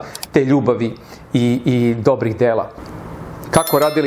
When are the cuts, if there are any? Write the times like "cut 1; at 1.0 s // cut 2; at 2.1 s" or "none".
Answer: cut 1; at 2.8 s